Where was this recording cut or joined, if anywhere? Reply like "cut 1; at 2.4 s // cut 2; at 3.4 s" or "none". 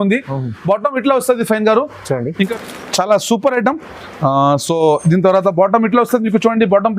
cut 1; at 2.5 s